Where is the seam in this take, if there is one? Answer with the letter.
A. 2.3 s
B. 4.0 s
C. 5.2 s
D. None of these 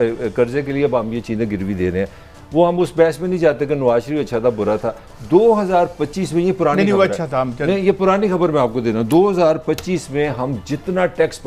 D